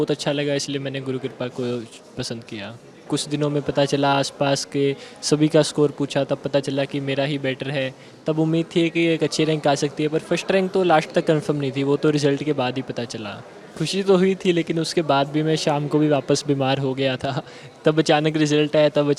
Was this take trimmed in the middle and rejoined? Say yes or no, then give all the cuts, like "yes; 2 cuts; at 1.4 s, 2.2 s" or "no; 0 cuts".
yes; 2 cuts; at 3.1 s, 13.7 s